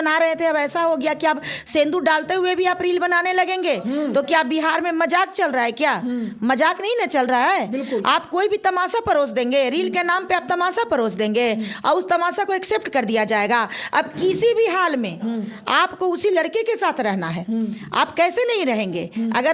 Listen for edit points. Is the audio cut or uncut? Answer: uncut